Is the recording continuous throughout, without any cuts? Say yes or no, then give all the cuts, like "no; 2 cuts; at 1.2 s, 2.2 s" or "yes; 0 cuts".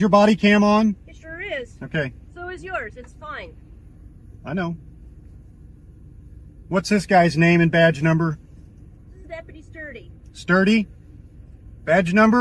yes; 0 cuts